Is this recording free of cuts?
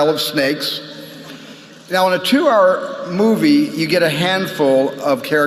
no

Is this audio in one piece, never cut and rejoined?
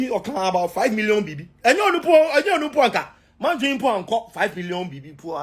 yes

